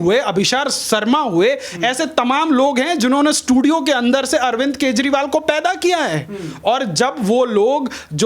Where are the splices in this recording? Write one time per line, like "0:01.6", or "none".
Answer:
none